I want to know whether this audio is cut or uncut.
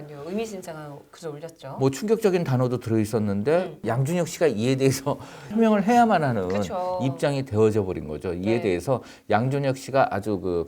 cut